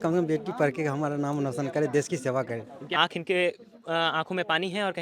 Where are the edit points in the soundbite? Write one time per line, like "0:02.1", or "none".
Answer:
0:02.8